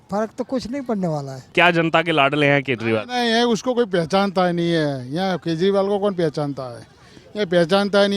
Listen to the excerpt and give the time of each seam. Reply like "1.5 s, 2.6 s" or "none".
1.5 s